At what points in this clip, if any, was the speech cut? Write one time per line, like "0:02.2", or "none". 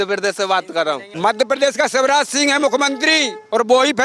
0:01.1